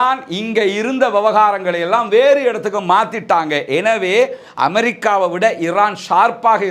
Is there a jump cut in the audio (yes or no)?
no